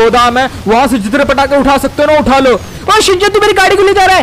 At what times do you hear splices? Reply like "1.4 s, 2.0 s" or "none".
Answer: 2.7 s